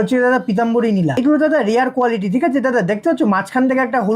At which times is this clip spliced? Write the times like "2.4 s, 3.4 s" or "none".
1.2 s